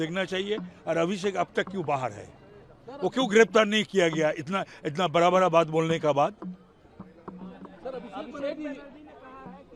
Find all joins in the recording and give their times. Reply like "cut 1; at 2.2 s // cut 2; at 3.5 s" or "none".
none